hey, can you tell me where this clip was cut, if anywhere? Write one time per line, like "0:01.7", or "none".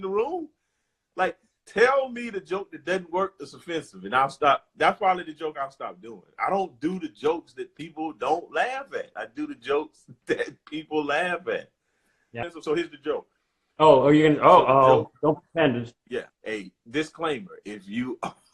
0:12.3
0:16.4

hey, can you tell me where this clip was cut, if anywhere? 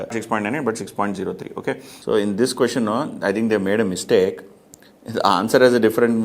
0:01.9

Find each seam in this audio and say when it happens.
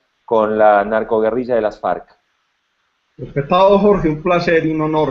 0:01.5

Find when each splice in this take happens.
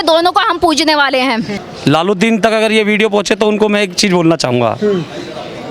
0:01.6

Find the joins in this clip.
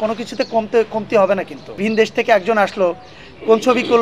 0:01.8

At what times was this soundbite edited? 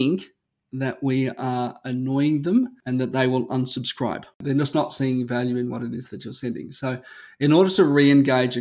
0:02.8
0:04.3

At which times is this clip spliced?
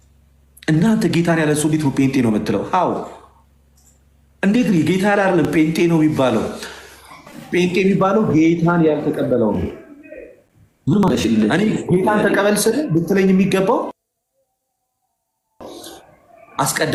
none

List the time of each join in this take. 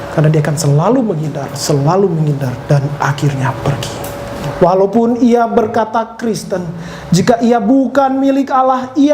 0:04.4

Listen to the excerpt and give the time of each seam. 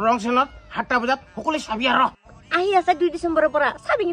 0:02.2

